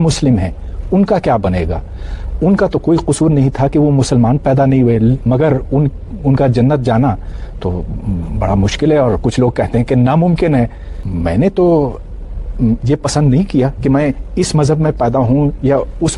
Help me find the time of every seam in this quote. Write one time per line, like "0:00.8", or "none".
0:11.0